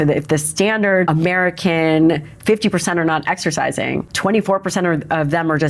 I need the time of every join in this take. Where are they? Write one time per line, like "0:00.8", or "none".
0:01.1
0:04.1